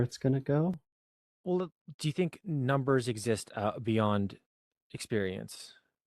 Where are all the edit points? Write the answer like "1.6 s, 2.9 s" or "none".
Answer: 0.9 s